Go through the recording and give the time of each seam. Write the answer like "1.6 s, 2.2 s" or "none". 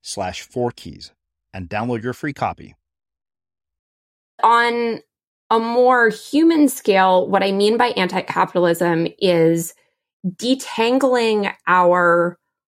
4.4 s